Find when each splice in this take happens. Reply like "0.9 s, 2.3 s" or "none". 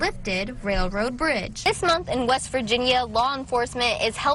1.7 s